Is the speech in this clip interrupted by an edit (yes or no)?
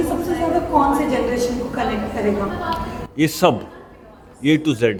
no